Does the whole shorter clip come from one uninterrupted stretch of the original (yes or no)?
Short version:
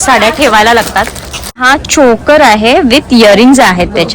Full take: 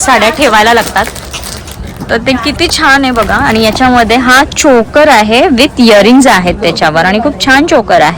no